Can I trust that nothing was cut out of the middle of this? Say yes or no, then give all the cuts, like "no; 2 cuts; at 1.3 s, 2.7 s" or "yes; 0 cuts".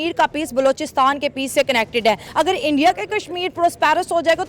no; 1 cut; at 2.2 s